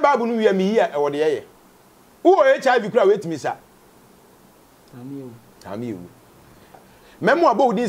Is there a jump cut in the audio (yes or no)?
yes